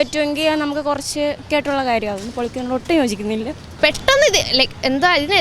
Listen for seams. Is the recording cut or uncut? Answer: cut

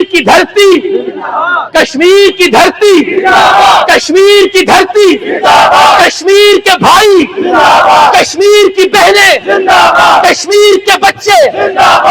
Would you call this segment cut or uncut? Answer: uncut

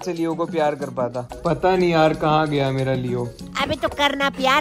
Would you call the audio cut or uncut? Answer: uncut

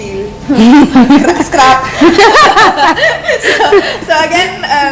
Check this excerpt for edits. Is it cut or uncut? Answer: uncut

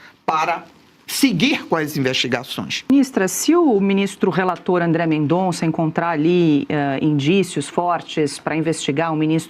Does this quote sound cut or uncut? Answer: cut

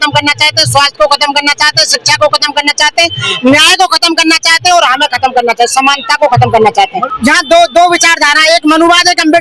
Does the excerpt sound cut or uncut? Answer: cut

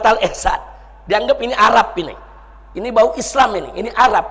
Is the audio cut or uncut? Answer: uncut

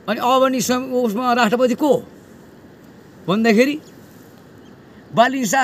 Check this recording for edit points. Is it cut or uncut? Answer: uncut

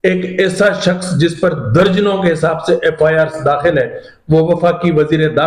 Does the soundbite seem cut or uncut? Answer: uncut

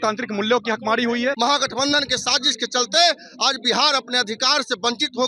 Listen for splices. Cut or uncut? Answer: cut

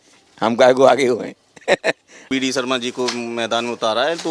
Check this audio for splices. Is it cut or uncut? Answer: cut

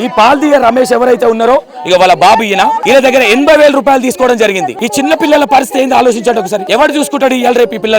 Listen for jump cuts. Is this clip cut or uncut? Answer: cut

